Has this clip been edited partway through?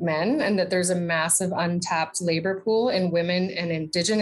no; 0 cuts

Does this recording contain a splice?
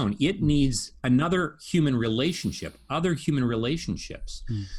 no; 0 cuts

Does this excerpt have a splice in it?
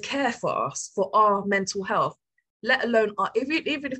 no; 0 cuts

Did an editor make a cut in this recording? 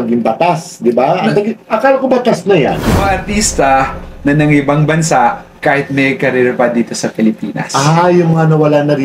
yes; 1 cut; at 2.9 s

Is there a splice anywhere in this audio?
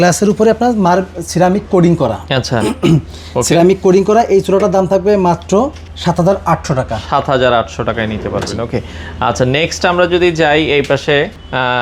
no; 0 cuts

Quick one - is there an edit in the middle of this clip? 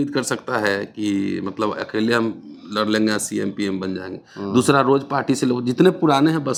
no; 0 cuts

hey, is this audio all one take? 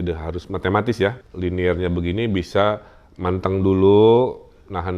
no; 1 cut; at 1.3 s

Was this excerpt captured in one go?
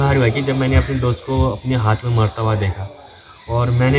yes; 0 cuts

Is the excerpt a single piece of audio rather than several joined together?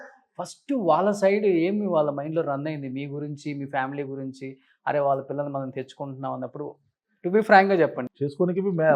no; 1 cut; at 8.0 s

